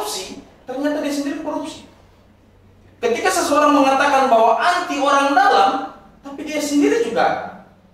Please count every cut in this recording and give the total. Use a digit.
0